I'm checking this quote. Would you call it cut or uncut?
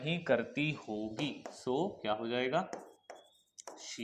uncut